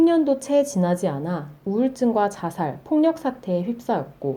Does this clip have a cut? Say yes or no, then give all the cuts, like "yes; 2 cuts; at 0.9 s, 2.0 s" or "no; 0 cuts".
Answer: no; 0 cuts